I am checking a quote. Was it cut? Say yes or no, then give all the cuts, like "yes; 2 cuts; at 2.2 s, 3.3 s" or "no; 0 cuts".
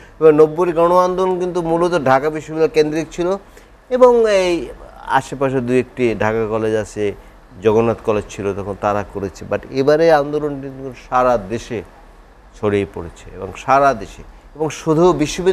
no; 0 cuts